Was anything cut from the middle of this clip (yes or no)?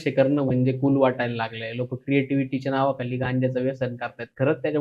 no